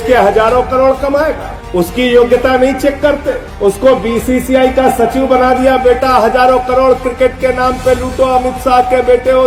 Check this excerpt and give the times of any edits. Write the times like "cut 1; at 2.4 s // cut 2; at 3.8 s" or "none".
none